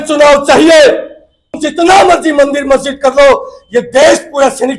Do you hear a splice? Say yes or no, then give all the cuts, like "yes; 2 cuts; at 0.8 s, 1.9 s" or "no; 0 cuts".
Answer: yes; 1 cut; at 1.6 s